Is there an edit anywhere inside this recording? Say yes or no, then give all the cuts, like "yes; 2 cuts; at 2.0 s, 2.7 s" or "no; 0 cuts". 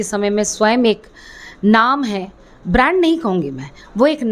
no; 0 cuts